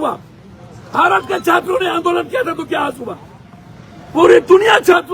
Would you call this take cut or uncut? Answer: uncut